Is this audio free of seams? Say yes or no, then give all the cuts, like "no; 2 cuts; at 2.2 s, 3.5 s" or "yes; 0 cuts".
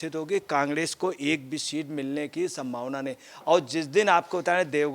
yes; 0 cuts